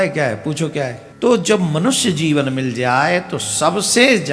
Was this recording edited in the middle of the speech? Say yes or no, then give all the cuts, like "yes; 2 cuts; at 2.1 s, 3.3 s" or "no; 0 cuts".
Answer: yes; 1 cut; at 1.0 s